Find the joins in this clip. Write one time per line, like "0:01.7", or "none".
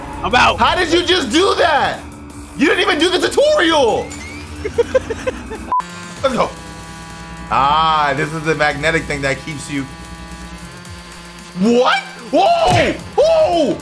0:05.6

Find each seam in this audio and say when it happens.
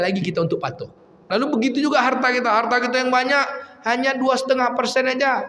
0:01.2

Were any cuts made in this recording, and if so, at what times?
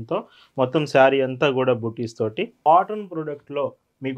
0:02.7

